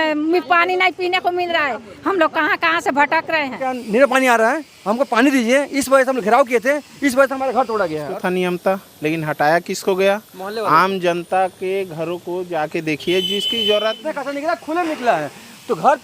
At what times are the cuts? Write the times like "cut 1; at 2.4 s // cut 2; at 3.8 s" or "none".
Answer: cut 1; at 3.7 s // cut 2; at 8.0 s // cut 3; at 14.0 s